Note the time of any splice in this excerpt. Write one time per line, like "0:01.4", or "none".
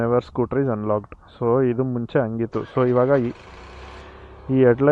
none